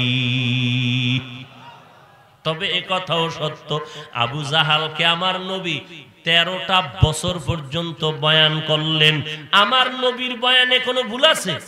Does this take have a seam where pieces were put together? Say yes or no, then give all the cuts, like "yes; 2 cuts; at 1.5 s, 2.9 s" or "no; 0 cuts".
no; 0 cuts